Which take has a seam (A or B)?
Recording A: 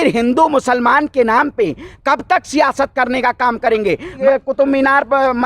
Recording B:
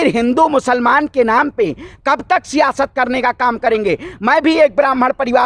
A